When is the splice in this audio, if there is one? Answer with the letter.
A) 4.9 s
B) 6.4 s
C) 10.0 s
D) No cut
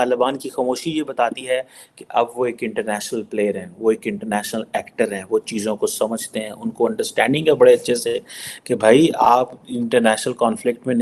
D